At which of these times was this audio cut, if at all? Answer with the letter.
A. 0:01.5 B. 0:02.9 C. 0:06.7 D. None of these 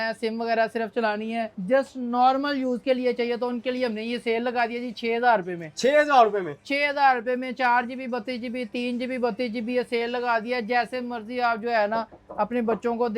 A